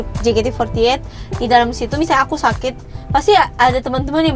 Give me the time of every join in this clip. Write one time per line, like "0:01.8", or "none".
none